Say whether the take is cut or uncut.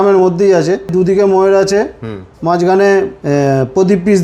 cut